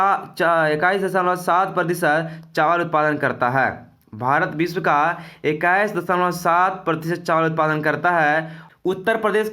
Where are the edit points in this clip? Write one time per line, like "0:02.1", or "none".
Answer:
0:08.6